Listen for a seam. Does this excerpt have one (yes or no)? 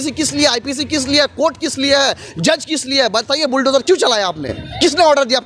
no